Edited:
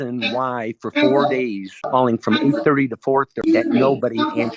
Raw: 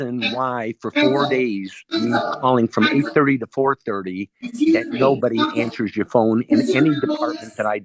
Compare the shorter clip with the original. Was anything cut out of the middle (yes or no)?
yes